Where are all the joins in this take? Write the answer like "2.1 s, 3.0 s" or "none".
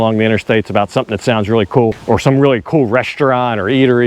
2.0 s